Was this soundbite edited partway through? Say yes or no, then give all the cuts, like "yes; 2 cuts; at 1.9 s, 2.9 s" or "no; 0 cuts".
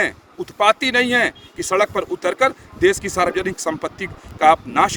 no; 0 cuts